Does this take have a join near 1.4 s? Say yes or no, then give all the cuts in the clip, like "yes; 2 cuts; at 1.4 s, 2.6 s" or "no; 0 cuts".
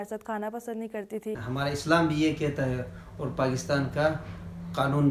yes; 1 cut; at 1.4 s